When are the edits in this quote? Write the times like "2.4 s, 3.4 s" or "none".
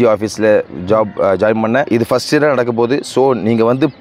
1.9 s